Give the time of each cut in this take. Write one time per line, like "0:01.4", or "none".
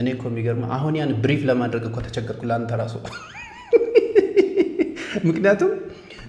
none